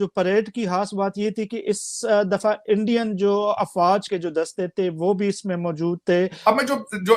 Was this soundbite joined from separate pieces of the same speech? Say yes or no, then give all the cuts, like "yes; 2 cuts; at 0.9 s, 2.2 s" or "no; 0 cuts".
yes; 2 cuts; at 4.1 s, 6.4 s